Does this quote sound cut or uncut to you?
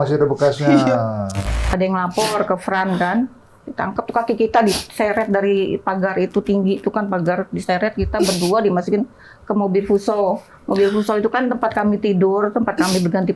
cut